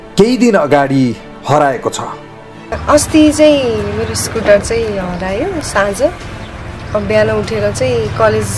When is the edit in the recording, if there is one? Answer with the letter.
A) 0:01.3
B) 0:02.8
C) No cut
B